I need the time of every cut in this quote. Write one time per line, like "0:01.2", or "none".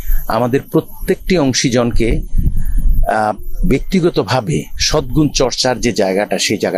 none